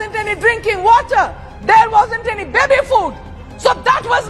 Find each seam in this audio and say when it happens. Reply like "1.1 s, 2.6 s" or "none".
none